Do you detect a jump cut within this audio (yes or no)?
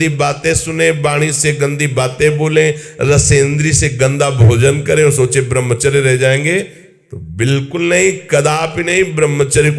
no